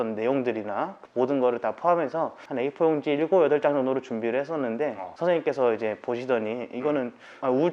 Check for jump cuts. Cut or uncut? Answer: cut